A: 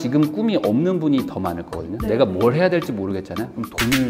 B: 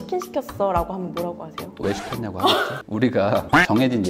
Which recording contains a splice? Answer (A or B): B